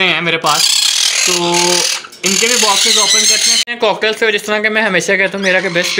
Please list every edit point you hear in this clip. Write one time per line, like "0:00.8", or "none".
0:03.5